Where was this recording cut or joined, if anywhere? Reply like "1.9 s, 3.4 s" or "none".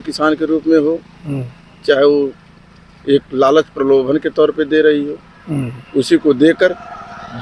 none